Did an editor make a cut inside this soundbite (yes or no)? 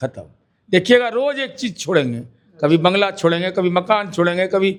no